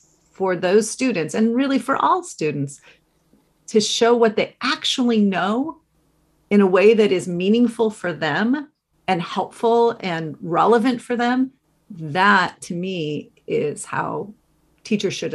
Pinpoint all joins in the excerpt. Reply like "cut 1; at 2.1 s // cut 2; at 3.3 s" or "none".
none